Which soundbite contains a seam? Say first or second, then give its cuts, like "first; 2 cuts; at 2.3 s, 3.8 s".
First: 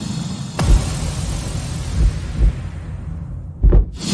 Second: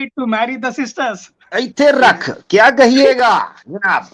second; 1 cut; at 1.3 s